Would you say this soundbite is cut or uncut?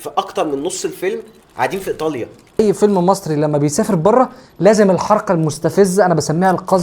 cut